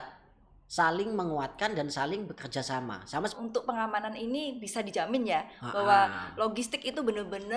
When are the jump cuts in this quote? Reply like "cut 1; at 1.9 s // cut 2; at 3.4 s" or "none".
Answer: cut 1; at 3.4 s